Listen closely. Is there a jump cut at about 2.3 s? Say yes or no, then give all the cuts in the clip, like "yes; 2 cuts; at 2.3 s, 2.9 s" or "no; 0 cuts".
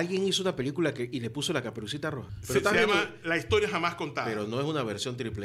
yes; 1 cut; at 2.3 s